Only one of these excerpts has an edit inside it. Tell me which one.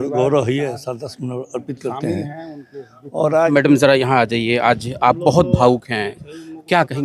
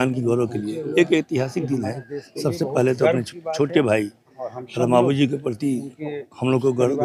first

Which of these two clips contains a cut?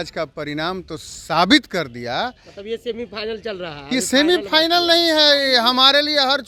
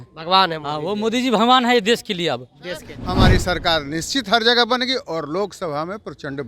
second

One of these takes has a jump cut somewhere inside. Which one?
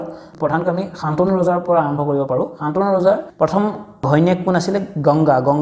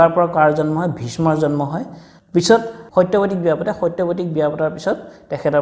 second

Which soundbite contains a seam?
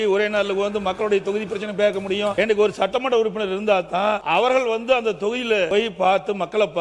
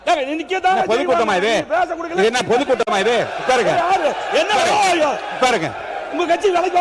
first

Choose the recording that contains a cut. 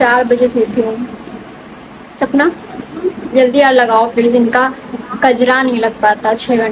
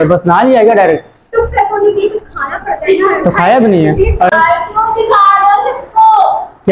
second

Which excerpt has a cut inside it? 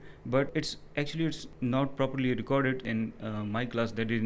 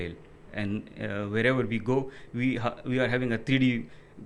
first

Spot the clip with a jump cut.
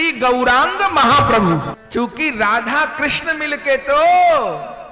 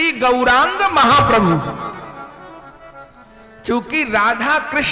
first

